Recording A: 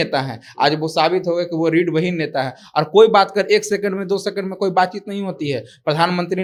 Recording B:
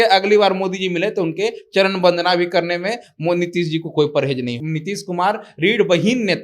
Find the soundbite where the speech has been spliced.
B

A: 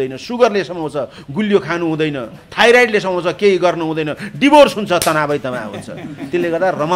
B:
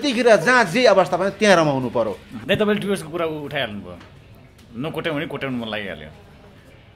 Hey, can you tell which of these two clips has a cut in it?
B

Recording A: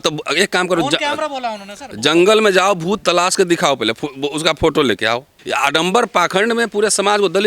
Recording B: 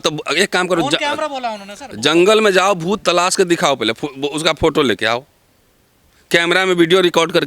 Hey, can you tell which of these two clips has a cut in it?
A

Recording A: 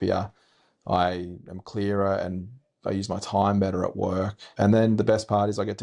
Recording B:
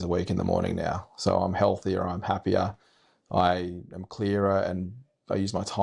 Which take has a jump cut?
A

